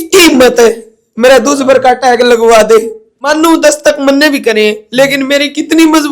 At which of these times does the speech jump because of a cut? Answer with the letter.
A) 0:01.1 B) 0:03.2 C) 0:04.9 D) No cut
B